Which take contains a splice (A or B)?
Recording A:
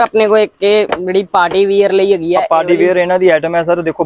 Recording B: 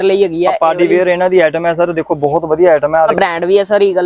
B